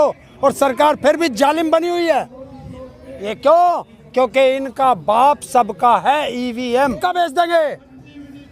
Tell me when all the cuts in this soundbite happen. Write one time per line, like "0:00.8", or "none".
0:07.0

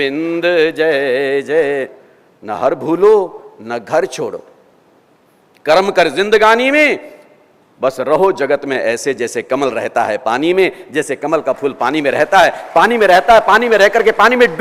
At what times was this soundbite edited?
0:02.0

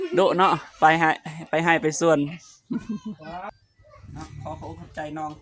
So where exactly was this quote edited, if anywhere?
0:03.5

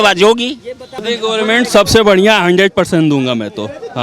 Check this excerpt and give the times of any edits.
0:01.0

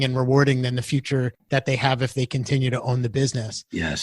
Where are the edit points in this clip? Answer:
0:01.4

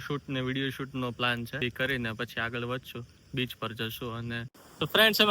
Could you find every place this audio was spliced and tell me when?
0:01.6
0:04.5

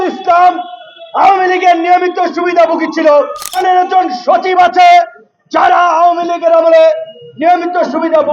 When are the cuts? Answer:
0:03.6

